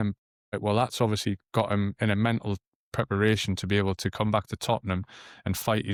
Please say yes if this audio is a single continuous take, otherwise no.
yes